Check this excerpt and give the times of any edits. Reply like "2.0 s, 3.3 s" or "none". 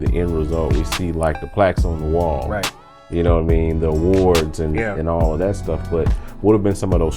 none

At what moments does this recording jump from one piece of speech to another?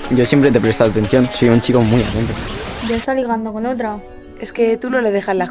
none

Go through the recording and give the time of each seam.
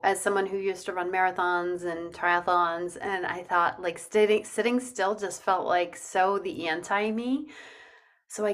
none

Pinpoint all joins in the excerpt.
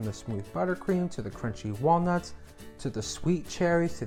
none

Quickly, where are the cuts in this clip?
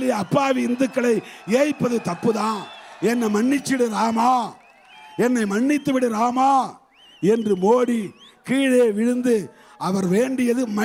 none

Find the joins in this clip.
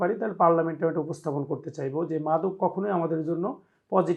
none

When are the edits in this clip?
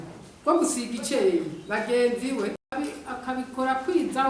2.7 s

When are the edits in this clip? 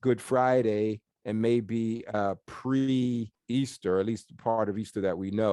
1.1 s, 3.4 s

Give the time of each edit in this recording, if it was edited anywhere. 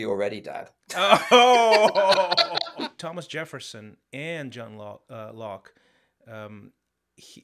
2.7 s

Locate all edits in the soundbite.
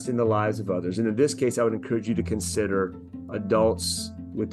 none

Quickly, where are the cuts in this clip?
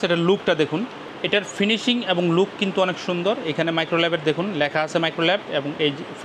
1.0 s

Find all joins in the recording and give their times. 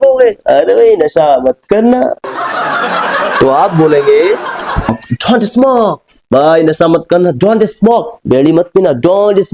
4.9 s

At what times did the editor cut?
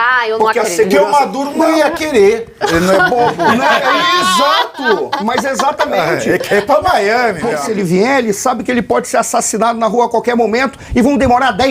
7.6 s

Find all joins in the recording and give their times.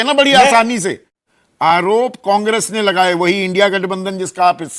1.1 s

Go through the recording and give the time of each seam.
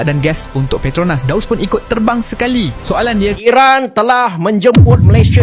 3.4 s

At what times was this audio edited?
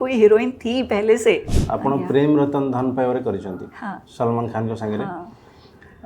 1.5 s

